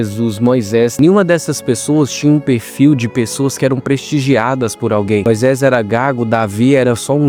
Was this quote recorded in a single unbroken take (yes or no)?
yes